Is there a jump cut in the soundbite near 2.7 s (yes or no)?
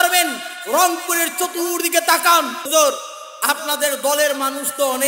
yes